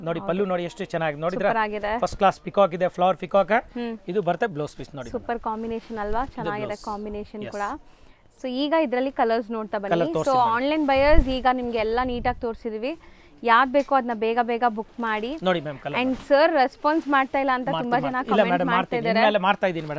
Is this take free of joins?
yes; 0 cuts

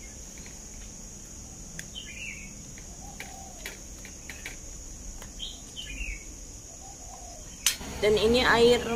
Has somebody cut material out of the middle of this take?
yes; 1 cut; at 7.8 s

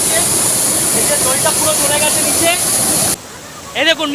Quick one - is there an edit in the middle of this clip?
yes; 1 cut; at 3.2 s

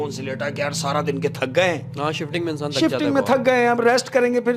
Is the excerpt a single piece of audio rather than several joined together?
yes; 0 cuts

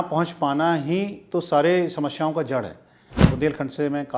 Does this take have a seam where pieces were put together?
yes; 1 cut; at 3.1 s

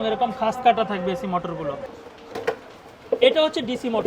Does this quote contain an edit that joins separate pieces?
yes; 1 cut; at 1.8 s

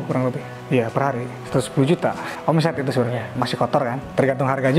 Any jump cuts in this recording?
yes; 1 cut; at 3.3 s

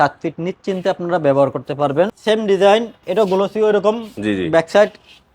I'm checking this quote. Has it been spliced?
yes; 1 cut; at 2.2 s

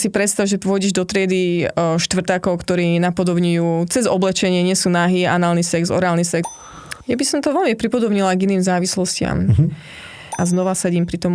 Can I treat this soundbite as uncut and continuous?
no; 2 cuts; at 6.4 s, 10.2 s

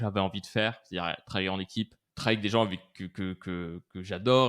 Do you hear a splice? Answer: yes; 1 cut; at 2.0 s

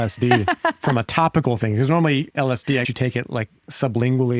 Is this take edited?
yes; 1 cut; at 2.7 s

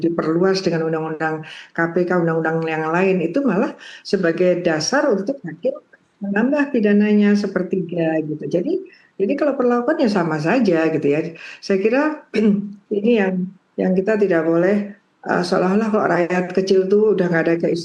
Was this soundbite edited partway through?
no; 0 cuts

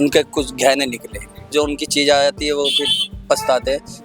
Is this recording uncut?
no; 1 cut; at 1.5 s

